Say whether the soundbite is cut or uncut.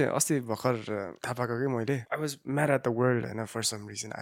cut